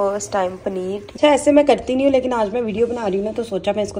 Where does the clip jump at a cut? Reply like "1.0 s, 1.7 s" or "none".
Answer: 1.1 s